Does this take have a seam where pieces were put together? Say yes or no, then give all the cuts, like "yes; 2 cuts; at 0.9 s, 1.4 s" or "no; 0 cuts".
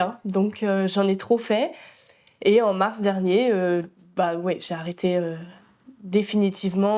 no; 0 cuts